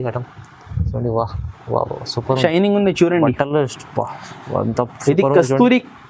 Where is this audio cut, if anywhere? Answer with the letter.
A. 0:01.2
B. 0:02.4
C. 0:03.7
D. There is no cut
B